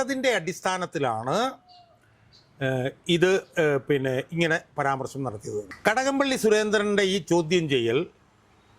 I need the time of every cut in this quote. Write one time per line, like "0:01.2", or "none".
0:05.7